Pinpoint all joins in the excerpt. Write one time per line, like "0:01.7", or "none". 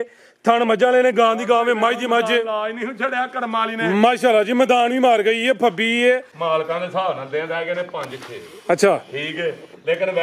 0:06.3